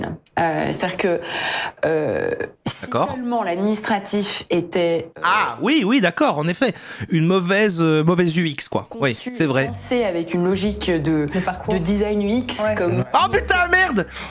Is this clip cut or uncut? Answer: uncut